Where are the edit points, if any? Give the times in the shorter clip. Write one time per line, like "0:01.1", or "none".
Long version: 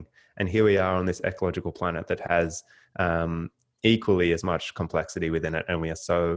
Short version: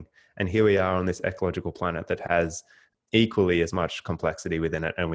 0:02.8